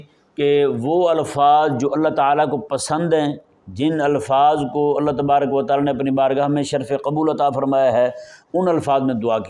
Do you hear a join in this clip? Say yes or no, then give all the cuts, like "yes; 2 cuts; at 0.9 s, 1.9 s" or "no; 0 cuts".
no; 0 cuts